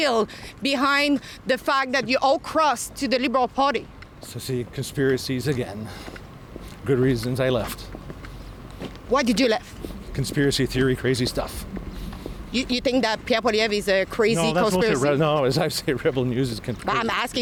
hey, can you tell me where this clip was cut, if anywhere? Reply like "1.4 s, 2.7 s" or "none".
none